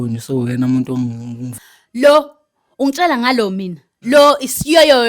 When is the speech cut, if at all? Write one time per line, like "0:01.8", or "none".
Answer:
0:01.7

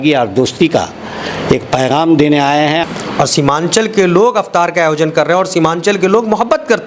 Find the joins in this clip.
0:02.8

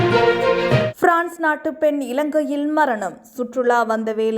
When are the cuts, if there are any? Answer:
0:00.9

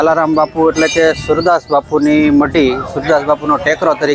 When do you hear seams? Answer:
none

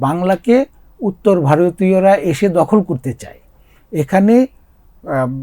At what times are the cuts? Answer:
none

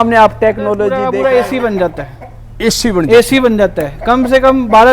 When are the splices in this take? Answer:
0:01.0

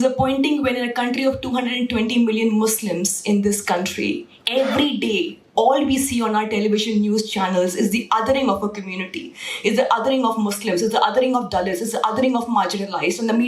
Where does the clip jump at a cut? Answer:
none

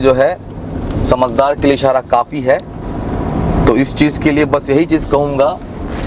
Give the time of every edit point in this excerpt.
none

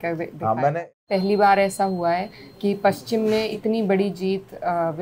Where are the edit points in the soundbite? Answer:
0:01.0
0:03.5

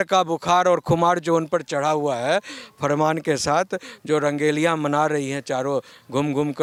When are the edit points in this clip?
none

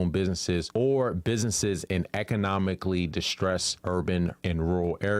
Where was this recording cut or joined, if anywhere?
0:03.7
0:04.4

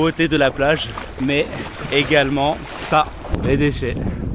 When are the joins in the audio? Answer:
0:03.4

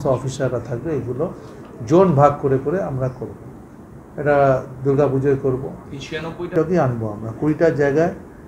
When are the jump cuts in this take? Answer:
0:06.5

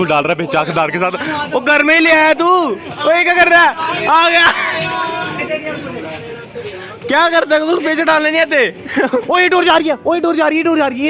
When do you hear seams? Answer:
0:05.4
0:09.2

